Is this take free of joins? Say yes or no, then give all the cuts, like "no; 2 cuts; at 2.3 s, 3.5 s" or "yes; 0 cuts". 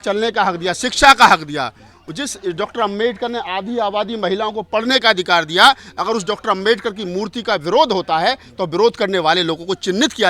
yes; 0 cuts